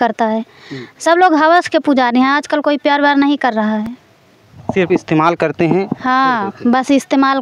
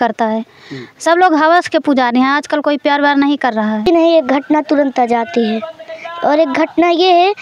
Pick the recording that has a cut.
second; 1 cut; at 3.8 s

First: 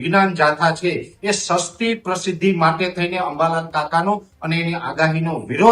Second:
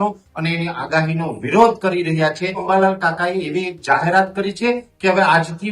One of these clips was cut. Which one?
second; 1 cut; at 2.6 s

